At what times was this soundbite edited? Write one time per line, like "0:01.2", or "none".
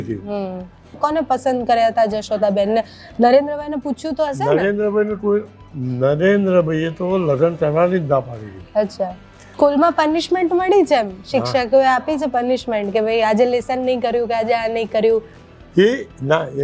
0:01.0
0:09.5